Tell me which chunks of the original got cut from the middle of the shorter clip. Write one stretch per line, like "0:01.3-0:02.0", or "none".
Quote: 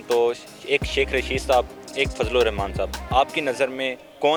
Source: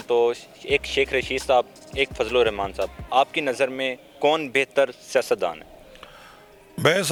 none